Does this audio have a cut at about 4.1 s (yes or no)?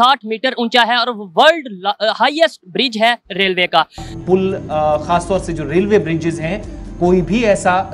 yes